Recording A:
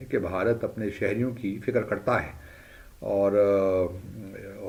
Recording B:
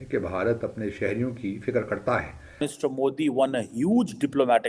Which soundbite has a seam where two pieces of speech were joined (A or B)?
B